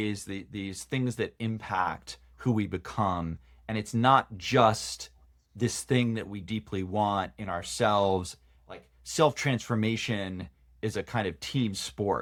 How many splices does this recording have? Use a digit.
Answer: 0